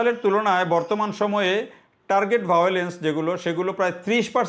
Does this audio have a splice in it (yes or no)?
no